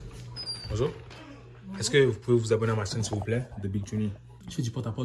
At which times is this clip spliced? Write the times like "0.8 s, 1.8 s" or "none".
none